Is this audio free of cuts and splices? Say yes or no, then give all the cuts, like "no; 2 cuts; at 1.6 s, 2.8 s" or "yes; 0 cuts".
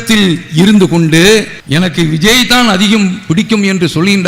no; 1 cut; at 1.6 s